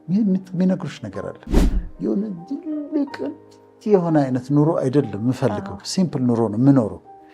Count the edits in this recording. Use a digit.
1